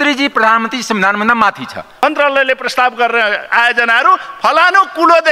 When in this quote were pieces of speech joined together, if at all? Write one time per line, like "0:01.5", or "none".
0:02.0